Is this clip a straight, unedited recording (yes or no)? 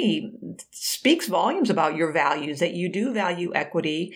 yes